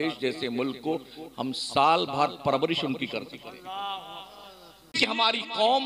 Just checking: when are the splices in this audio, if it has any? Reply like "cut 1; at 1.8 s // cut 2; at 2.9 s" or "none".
cut 1; at 4.9 s